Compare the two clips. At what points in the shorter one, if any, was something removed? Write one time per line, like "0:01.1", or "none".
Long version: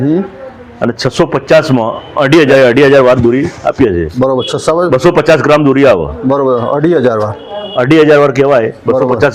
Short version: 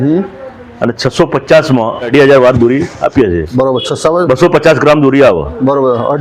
0:02.1